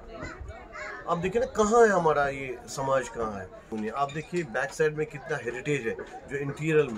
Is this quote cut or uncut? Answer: cut